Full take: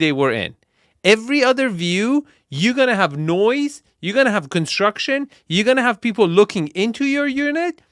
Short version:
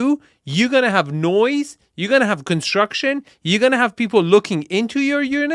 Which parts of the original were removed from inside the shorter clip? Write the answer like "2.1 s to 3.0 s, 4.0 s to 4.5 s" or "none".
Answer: none